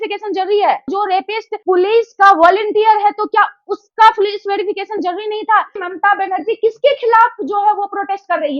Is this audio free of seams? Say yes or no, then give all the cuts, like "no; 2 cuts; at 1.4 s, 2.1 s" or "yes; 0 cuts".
no; 1 cut; at 5.9 s